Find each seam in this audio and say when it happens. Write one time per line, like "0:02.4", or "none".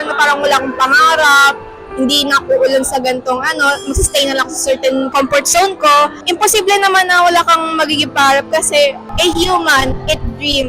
0:05.1
0:06.2
0:09.0